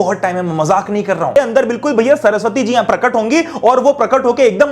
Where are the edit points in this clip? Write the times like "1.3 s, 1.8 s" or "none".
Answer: 1.4 s